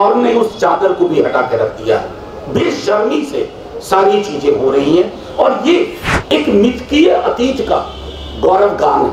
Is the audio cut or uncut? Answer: cut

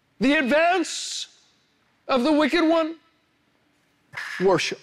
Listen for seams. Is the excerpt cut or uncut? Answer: uncut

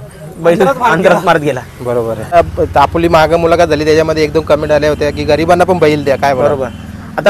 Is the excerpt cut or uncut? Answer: cut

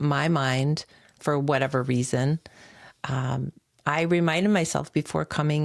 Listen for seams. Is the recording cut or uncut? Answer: uncut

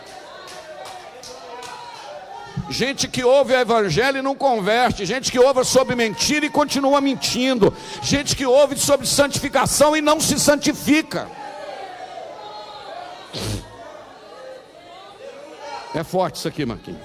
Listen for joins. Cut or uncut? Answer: uncut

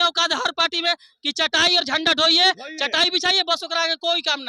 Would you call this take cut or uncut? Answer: uncut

